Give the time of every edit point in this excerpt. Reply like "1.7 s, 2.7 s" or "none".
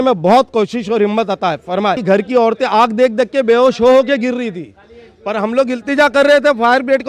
2.0 s

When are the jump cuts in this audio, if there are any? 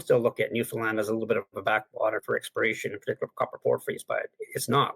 2.2 s

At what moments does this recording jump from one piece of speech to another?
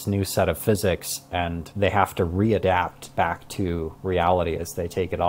1.6 s

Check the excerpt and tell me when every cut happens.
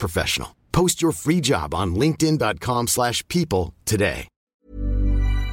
4.4 s

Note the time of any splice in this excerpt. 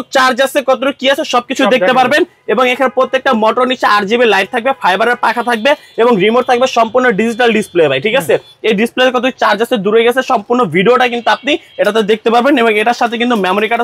none

